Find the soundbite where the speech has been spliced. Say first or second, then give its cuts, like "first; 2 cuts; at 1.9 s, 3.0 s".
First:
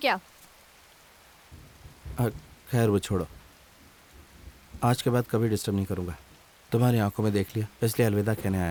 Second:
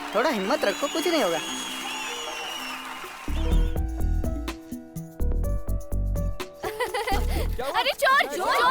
second; 1 cut; at 3.2 s